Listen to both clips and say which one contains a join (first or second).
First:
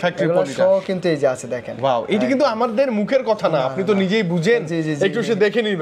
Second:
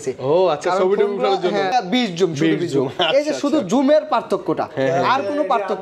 second